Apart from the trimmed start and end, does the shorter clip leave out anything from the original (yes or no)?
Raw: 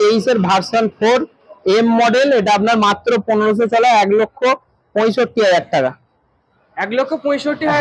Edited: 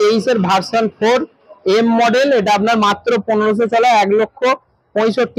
no